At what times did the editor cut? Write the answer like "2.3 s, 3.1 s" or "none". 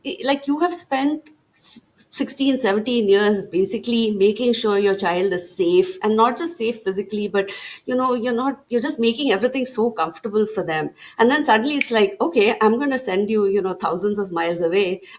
none